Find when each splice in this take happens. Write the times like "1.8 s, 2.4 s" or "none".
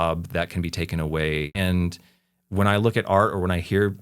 1.6 s